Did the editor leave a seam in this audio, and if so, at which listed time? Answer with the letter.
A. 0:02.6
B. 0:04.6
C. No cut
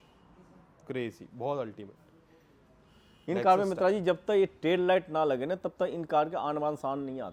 C